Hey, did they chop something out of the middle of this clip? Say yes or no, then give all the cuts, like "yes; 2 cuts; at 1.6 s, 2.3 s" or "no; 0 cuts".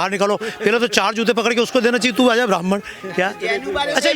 no; 0 cuts